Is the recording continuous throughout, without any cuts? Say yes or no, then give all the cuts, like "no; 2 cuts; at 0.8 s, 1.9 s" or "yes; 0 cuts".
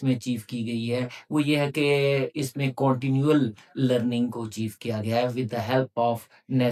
yes; 0 cuts